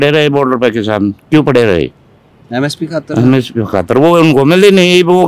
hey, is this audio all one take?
yes; 0 cuts

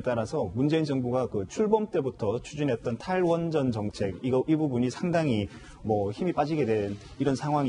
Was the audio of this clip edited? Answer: yes; 1 cut; at 6.6 s

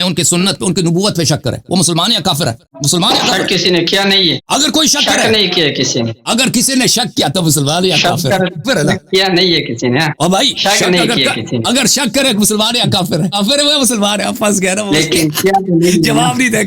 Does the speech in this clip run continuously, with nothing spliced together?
no; 3 cuts; at 4.4 s, 10.4 s, 13.3 s

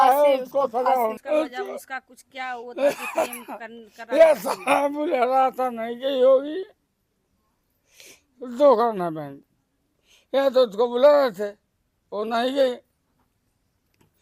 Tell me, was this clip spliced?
yes; 1 cut; at 1.2 s

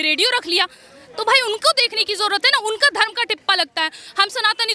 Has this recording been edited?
no; 0 cuts

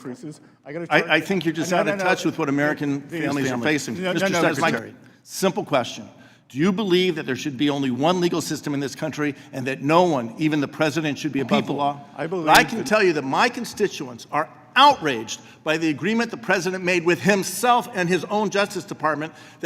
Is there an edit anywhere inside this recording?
yes; 2 cuts; at 4.8 s, 12.4 s

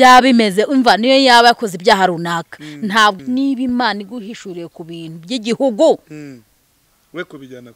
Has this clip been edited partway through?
yes; 1 cut; at 3.2 s

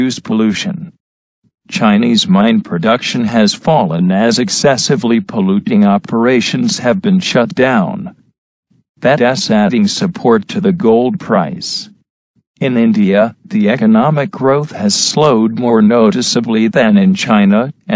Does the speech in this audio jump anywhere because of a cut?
no; 0 cuts

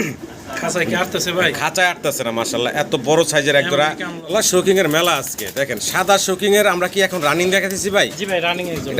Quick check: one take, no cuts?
no; 1 cut; at 4.2 s

